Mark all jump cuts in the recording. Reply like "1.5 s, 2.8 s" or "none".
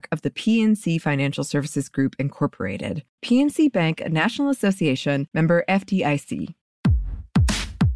6.9 s

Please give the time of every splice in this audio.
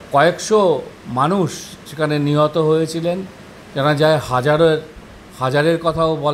none

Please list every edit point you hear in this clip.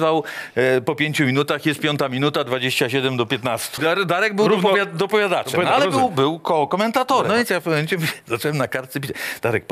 3.8 s, 7.3 s

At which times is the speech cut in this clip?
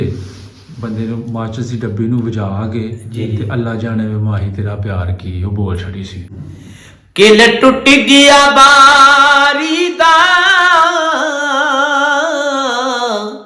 6.3 s

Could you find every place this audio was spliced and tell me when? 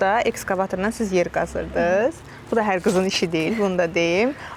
none

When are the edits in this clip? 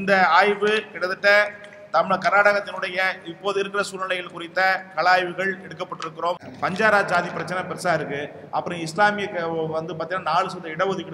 6.5 s

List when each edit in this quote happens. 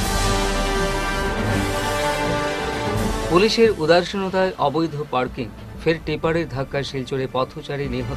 none

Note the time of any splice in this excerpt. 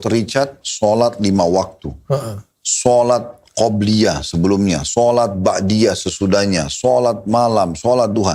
none

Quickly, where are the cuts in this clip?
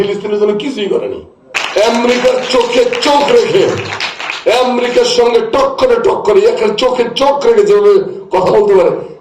1.5 s

